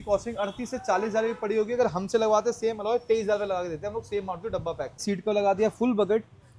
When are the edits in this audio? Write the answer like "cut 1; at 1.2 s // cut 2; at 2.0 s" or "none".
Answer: cut 1; at 5.0 s